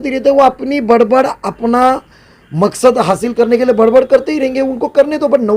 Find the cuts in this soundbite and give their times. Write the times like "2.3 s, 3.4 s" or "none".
none